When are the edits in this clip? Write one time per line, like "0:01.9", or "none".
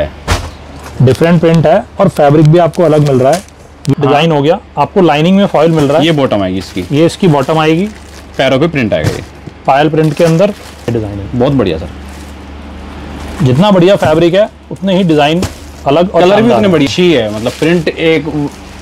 0:03.9
0:10.9
0:16.9

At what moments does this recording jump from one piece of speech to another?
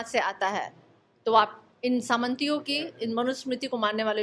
none

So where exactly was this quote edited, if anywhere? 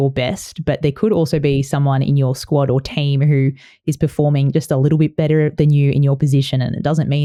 none

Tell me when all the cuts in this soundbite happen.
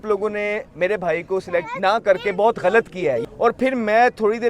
0:01.7
0:03.2

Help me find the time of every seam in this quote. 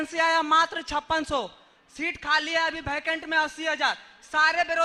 none

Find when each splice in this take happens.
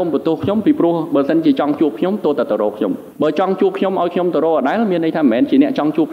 0:03.1

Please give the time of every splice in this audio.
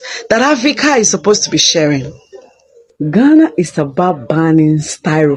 none

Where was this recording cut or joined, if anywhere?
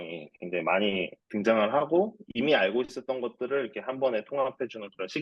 0:01.2

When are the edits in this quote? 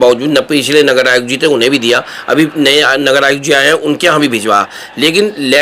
none

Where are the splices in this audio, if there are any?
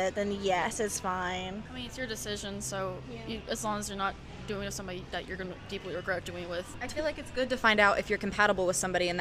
none

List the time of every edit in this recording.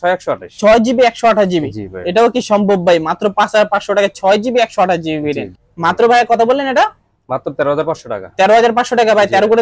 0:05.6

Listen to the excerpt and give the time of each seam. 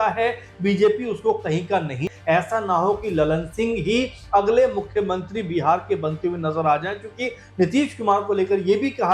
0:02.1

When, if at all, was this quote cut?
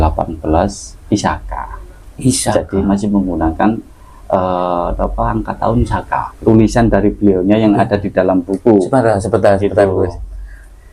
0:06.3

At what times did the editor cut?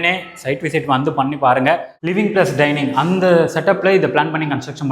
0:02.0

